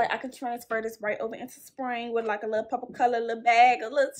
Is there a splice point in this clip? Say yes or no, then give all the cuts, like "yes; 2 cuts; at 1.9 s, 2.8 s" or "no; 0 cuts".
no; 0 cuts